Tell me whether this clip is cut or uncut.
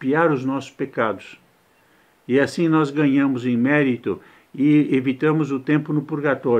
uncut